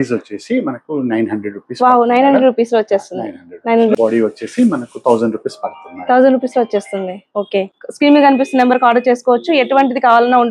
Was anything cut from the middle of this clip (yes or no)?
yes